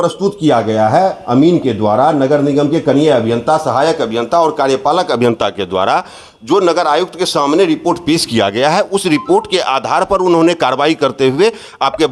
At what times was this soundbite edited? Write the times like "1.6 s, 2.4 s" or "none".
none